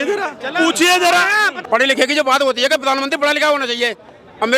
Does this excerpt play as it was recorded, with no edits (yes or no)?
no